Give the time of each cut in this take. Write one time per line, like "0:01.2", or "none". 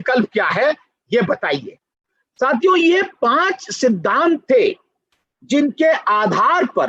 none